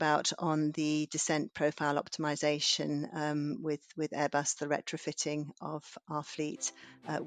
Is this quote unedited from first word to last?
yes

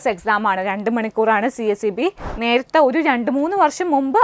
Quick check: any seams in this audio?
yes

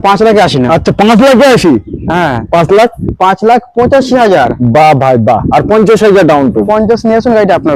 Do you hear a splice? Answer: no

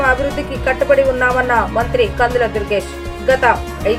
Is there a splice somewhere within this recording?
no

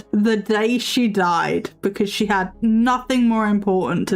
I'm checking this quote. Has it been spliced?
no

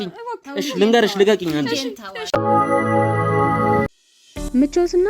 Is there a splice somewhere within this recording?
yes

